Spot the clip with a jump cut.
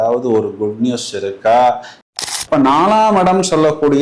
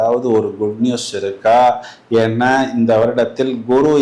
first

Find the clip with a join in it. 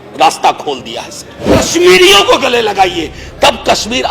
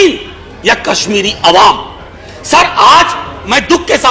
first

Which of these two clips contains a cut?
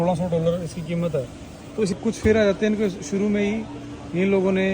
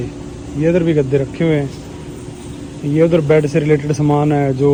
first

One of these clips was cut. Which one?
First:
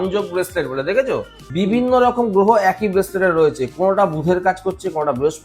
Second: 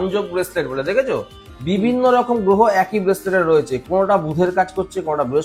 first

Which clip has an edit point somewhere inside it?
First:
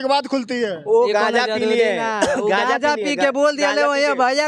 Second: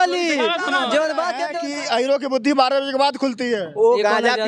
second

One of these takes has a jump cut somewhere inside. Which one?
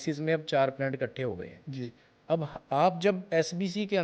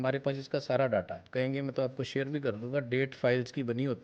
second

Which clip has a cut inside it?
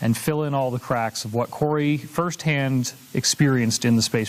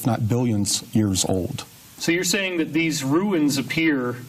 second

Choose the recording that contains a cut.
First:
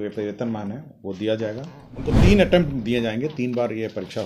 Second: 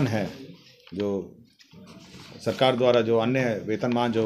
first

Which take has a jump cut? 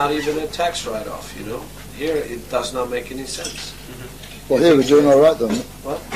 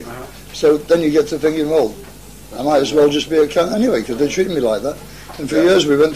first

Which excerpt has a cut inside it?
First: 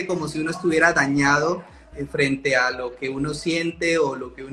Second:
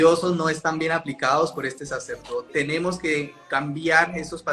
second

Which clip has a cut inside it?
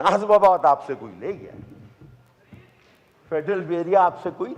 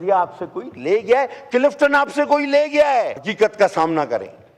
second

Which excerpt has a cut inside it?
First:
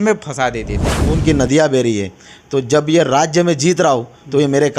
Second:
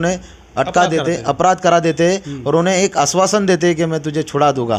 first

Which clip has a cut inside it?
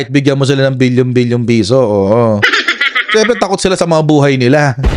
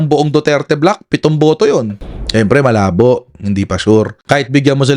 second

